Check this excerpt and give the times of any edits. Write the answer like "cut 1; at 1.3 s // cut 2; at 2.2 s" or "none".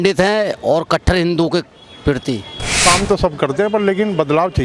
cut 1; at 2.8 s